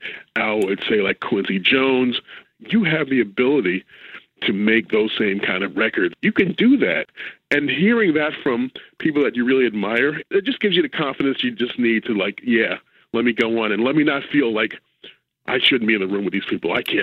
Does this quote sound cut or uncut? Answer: cut